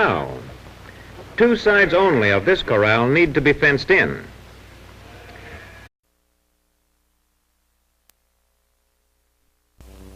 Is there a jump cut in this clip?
no; 0 cuts

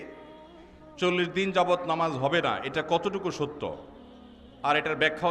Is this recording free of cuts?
yes; 0 cuts

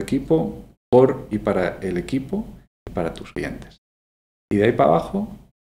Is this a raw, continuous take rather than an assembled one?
no; 1 cut; at 3.2 s

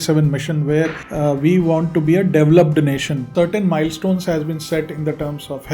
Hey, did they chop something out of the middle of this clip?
yes; 2 cuts; at 1.0 s, 3.3 s

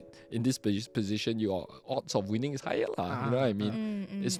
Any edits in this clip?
no; 0 cuts

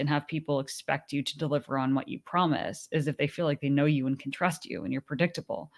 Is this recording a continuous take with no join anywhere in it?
yes; 0 cuts

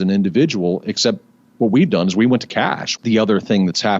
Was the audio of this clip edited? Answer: yes; 1 cut; at 2.9 s

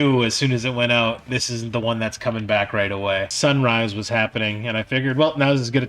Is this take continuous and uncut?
no; 1 cut; at 3.3 s

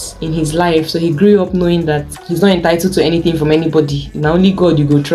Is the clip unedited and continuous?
yes; 0 cuts

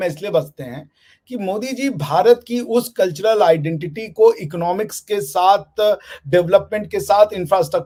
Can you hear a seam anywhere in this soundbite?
no; 0 cuts

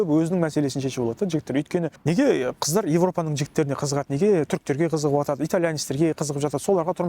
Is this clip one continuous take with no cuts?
no; 1 cut; at 2.0 s

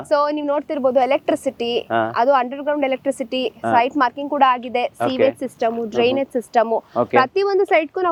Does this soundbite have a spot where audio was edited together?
no; 0 cuts

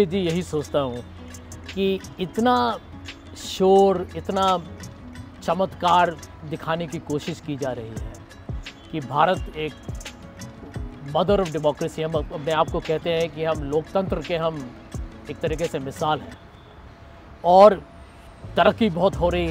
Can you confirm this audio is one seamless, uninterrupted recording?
yes; 0 cuts

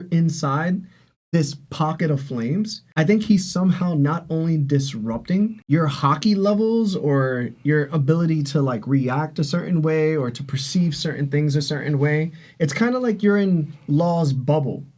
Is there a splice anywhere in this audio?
yes; 1 cut; at 5.6 s

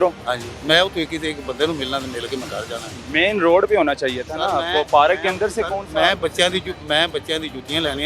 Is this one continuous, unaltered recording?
yes; 0 cuts

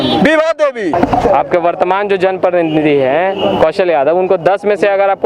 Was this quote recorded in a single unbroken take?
no; 1 cut; at 0.9 s

